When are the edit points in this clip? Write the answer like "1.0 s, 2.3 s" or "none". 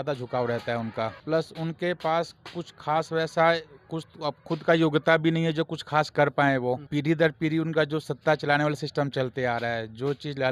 1.1 s, 6.8 s